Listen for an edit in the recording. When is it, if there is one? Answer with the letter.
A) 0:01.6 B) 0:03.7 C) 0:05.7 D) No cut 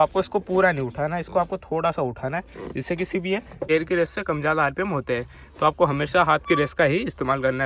B